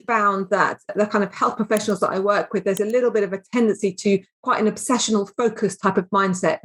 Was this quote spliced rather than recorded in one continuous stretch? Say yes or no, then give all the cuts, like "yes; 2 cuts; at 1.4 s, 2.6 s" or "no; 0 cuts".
no; 0 cuts